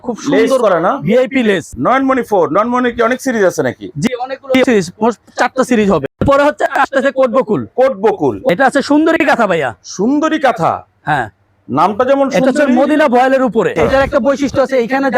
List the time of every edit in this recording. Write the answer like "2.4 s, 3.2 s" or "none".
1.7 s, 6.0 s, 8.4 s, 13.7 s